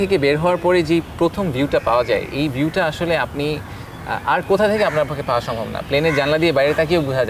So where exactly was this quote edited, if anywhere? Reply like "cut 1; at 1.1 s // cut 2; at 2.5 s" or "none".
none